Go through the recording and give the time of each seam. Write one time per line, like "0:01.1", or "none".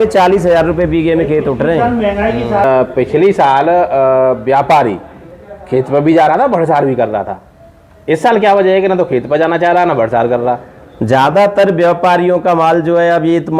0:02.6